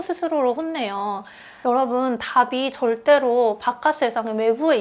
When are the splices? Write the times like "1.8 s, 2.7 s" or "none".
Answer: 1.4 s